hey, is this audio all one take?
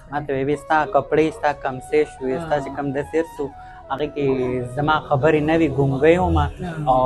yes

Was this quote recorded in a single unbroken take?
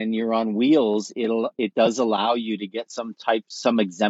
yes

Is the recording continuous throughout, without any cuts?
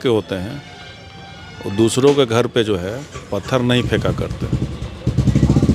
yes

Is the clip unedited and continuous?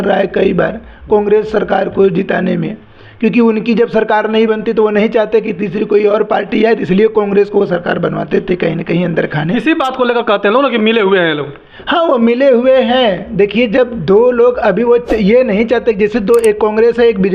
yes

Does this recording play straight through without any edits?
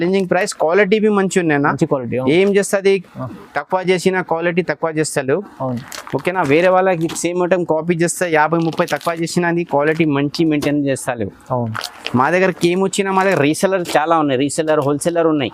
yes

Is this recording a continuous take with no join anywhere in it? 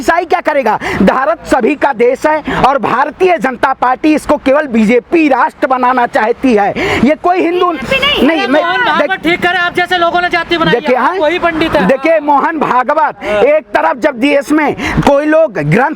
yes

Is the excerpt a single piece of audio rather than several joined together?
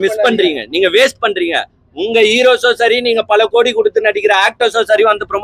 yes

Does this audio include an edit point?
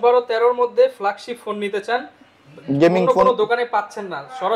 no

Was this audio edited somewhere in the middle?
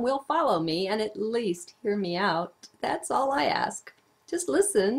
no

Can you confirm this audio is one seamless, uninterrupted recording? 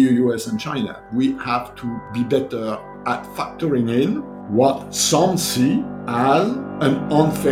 no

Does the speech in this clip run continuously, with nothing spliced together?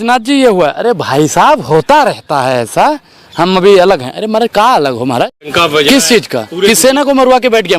no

